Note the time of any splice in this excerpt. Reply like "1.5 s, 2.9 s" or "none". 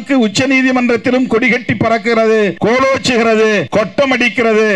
2.6 s, 3.7 s